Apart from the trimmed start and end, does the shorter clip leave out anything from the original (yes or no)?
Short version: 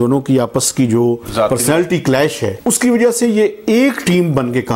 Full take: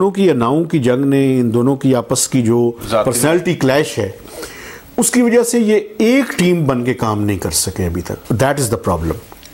yes